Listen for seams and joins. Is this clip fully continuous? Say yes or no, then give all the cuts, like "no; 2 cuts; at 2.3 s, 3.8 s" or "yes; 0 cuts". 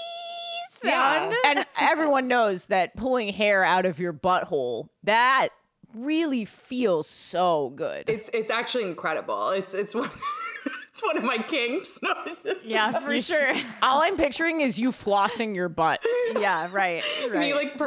no; 1 cut; at 1.4 s